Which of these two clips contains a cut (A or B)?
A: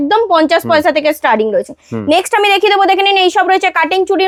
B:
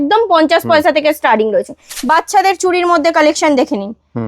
B